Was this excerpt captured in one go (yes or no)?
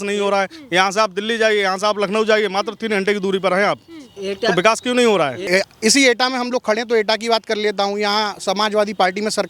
no